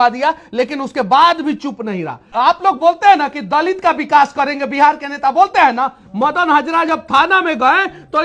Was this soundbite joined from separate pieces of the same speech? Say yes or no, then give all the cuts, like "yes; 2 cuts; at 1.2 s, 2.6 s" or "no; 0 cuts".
yes; 1 cut; at 2.3 s